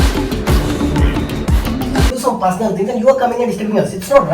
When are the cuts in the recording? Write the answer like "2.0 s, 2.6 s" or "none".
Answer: 2.1 s